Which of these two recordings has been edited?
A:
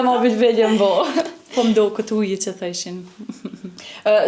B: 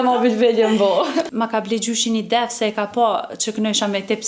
B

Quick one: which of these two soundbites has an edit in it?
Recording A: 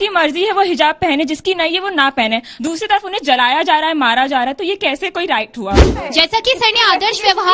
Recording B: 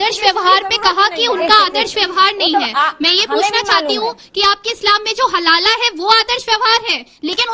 A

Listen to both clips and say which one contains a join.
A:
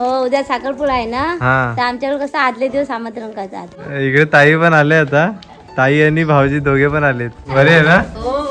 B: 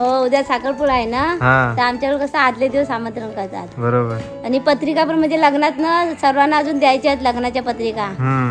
A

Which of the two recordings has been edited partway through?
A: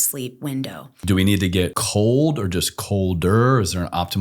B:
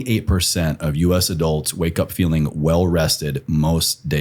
A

